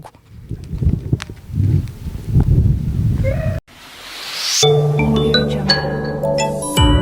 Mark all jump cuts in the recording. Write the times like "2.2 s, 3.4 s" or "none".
3.6 s

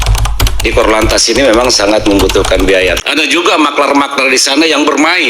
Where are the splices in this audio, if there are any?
3.0 s

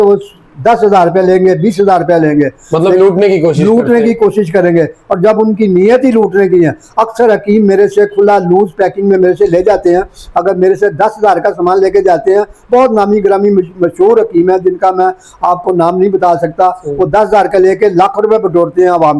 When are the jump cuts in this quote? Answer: none

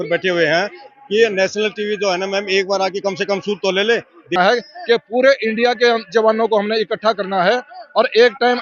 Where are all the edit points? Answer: 4.3 s

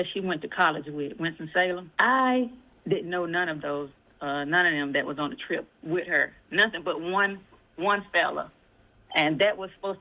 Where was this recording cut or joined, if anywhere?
1.9 s

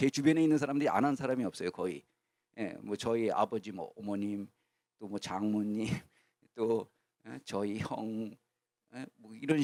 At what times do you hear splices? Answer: none

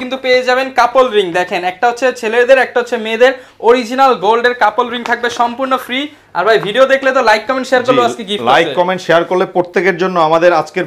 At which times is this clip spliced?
none

